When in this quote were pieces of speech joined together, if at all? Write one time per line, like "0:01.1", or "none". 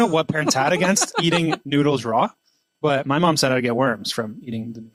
none